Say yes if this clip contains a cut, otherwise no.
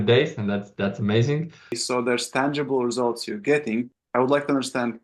yes